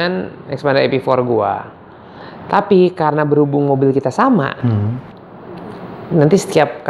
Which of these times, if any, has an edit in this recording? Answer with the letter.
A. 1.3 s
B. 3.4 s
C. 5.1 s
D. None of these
D